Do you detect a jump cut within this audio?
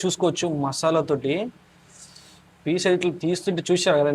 no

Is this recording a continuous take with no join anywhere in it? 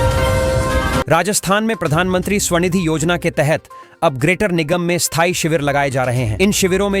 no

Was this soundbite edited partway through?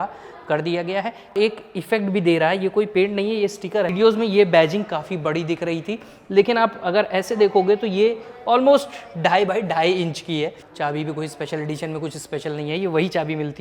yes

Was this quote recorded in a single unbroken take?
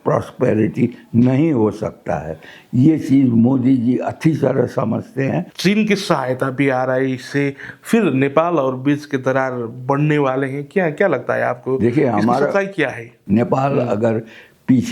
no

